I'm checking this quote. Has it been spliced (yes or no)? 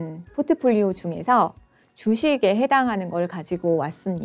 no